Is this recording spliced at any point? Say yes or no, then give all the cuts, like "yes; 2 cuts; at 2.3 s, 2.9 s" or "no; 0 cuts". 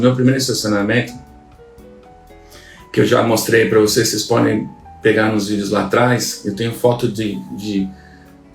no; 0 cuts